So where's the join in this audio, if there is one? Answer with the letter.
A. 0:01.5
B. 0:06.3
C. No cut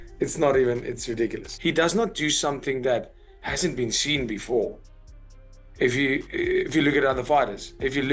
A